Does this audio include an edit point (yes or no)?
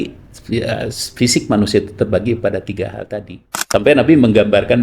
yes